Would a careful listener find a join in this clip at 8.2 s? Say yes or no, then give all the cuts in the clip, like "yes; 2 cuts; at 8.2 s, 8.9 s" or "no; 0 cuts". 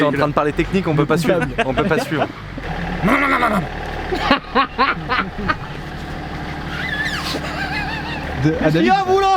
yes; 2 cuts; at 2.6 s, 8.2 s